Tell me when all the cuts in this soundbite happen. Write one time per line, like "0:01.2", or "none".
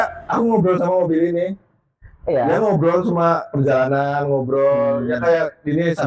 none